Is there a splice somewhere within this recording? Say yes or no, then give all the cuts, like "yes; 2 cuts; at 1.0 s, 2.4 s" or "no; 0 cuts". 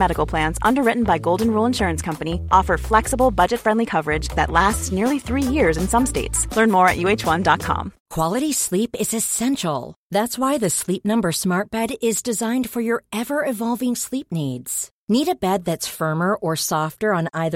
yes; 1 cut; at 8.0 s